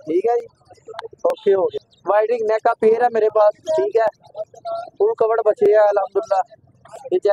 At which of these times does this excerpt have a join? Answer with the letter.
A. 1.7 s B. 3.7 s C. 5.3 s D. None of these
A